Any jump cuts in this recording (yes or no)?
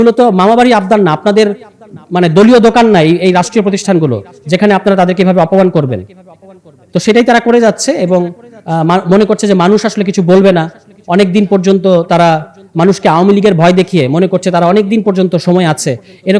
no